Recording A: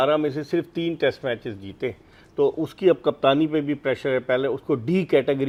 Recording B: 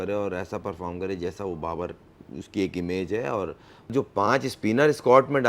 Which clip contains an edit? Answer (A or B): B